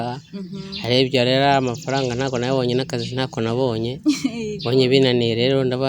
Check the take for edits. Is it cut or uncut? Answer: uncut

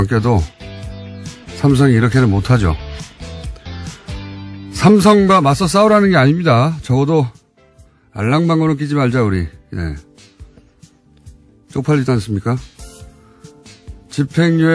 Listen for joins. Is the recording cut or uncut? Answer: cut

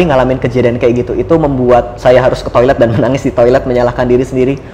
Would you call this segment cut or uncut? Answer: cut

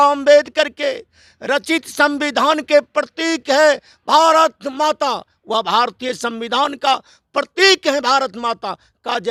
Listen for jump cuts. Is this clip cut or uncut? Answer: uncut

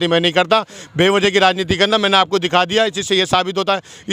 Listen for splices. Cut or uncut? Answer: uncut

